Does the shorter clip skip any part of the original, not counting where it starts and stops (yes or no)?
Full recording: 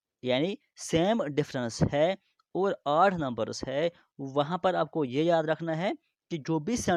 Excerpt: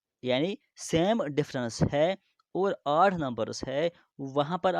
no